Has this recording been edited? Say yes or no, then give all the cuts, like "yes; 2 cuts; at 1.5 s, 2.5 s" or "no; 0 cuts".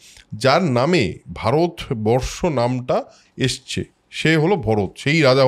no; 0 cuts